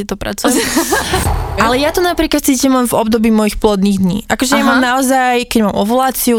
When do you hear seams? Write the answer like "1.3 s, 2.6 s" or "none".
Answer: 1.3 s

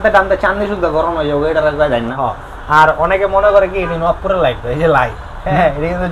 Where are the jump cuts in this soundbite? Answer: 2.2 s

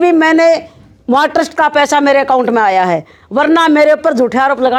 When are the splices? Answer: none

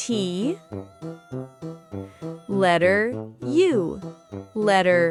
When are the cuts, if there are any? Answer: none

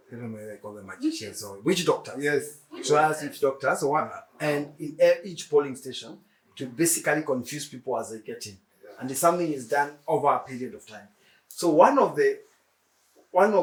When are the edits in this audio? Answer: none

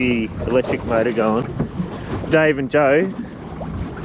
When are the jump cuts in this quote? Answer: 1.5 s

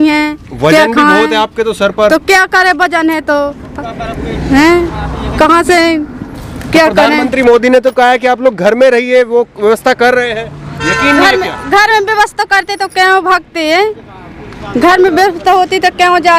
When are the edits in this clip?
none

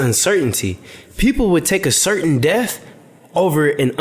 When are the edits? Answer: none

